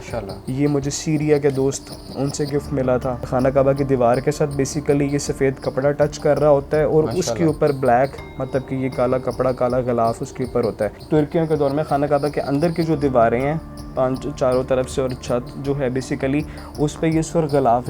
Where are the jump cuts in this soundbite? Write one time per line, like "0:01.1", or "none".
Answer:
0:03.3
0:11.0